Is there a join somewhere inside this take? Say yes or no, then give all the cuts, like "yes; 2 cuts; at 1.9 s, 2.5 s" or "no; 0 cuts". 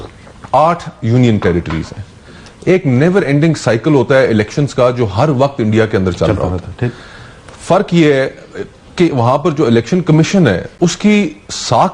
no; 0 cuts